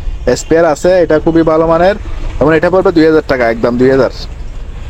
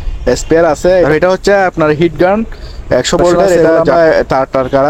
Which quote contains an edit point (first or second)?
second